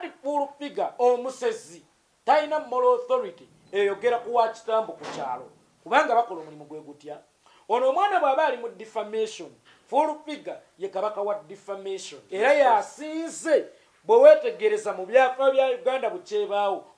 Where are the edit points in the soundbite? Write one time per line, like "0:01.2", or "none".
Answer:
0:12.1